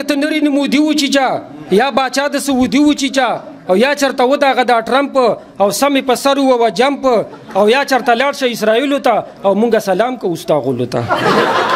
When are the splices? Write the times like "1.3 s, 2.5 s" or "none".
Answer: none